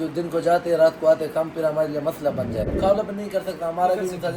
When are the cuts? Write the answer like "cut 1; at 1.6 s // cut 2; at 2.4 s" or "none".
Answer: cut 1; at 2.7 s